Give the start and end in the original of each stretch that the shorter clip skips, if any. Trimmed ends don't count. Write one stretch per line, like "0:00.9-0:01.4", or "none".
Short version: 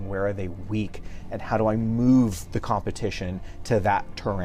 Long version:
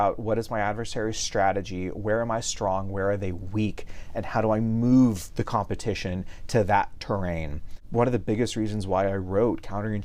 none

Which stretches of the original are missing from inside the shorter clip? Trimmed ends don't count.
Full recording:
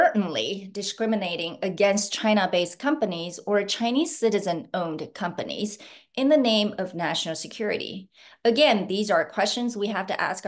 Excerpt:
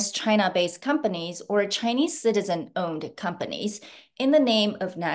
none

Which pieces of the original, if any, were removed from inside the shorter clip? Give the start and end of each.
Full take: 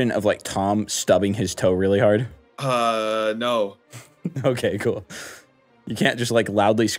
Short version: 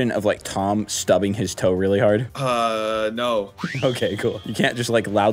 0:02.3-0:02.6
0:03.8-0:04.2
0:05.1-0:05.9

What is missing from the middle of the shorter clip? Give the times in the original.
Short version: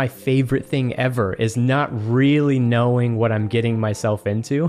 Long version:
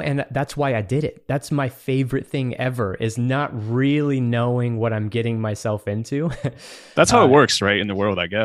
none

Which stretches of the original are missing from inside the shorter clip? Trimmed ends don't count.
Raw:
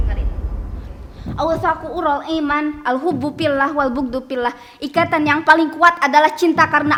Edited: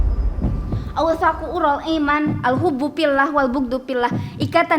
0:00.9-0:01.4

